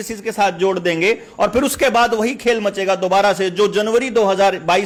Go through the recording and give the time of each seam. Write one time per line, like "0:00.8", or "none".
none